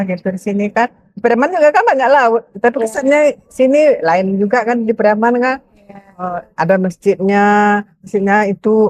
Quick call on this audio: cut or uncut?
uncut